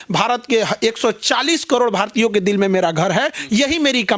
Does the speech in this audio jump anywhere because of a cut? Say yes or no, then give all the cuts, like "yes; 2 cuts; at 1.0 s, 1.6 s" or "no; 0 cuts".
no; 0 cuts